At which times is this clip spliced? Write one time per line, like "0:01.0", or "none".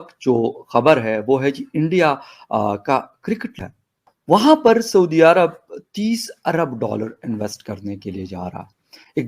0:03.6